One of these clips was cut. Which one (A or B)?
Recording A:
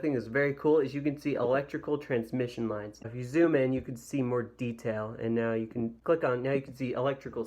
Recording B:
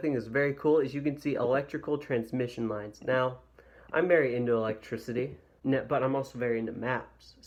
A